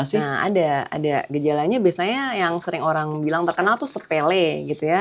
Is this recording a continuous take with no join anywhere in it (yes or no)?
yes